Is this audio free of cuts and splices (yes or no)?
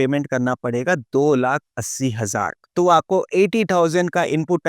no